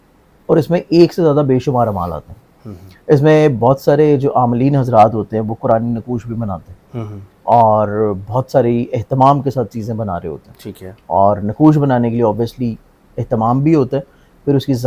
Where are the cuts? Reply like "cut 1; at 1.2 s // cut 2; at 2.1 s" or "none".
none